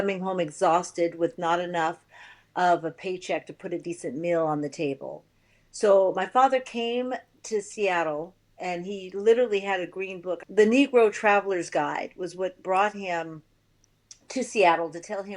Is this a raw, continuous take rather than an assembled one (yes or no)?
no